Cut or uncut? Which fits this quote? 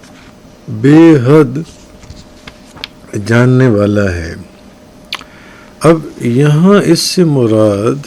cut